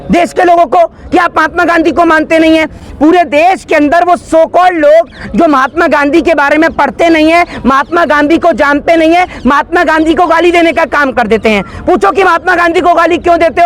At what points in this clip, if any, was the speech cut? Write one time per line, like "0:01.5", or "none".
none